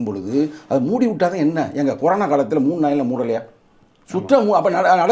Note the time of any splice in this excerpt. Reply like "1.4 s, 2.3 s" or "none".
none